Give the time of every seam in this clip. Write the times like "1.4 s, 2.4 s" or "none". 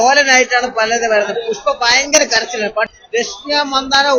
2.9 s